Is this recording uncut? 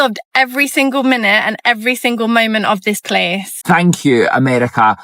no; 1 cut; at 3.6 s

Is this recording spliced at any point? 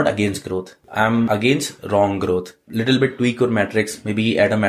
yes; 2 cuts; at 0.9 s, 2.6 s

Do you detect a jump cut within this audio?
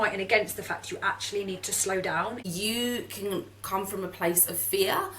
yes; 1 cut; at 2.4 s

